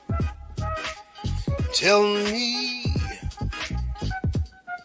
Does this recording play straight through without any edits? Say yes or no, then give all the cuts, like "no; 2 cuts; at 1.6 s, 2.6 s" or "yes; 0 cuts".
no; 1 cut; at 1.6 s